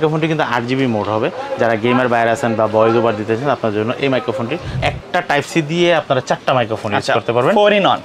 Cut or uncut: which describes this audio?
cut